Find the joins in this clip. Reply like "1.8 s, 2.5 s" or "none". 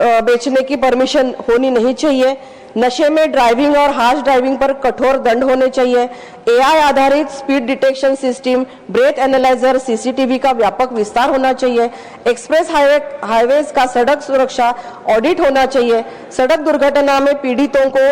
none